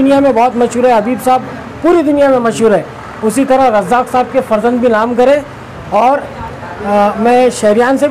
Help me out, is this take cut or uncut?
uncut